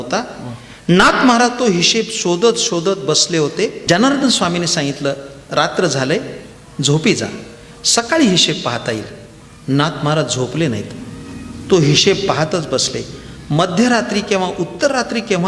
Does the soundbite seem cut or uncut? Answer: cut